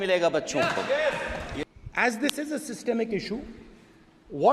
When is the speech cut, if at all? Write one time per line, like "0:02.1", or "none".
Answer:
0:01.6